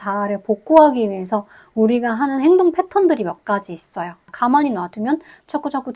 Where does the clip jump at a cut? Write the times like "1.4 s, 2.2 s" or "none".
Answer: 4.1 s